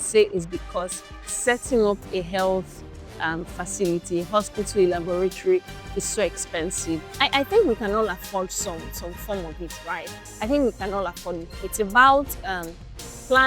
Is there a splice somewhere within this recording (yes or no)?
yes